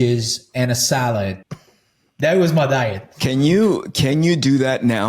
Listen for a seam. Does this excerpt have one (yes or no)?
yes